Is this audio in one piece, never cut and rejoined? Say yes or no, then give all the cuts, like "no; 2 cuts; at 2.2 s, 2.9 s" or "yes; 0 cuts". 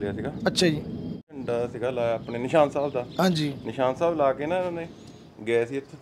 no; 1 cut; at 1.3 s